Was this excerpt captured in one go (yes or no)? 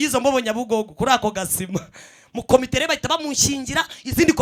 yes